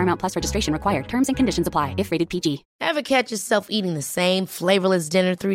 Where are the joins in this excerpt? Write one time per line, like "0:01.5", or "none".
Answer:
0:02.7

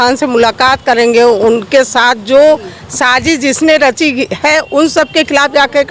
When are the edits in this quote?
none

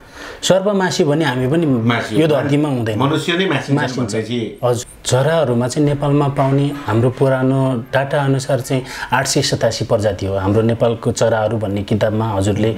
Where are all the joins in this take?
0:04.9

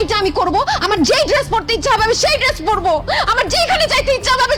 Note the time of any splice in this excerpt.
none

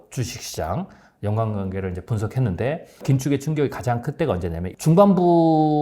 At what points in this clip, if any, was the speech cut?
0:03.0
0:04.7

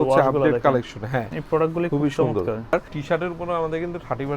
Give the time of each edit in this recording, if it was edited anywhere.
0:01.3
0:02.9

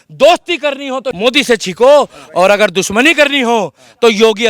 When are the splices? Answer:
0:01.1

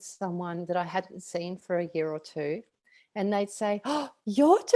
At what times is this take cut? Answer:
none

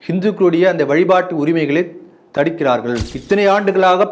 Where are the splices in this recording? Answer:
0:03.1

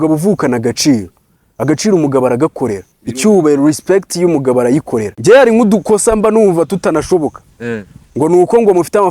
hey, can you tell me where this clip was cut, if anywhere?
0:05.1

